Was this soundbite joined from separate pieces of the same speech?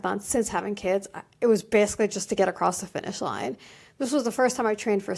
no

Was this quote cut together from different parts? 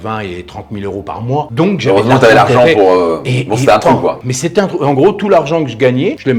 no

